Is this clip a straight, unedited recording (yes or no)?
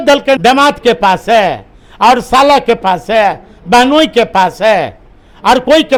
yes